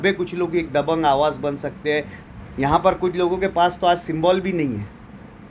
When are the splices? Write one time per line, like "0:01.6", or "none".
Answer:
0:02.2